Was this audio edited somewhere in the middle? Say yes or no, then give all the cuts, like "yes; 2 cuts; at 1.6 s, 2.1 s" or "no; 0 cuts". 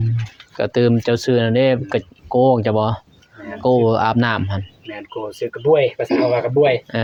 no; 0 cuts